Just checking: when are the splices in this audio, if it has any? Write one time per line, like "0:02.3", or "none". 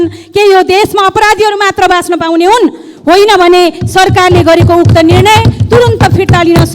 none